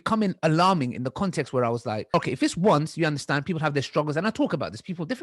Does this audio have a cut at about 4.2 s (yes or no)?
no